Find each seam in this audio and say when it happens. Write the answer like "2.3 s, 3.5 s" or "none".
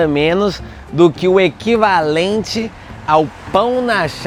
none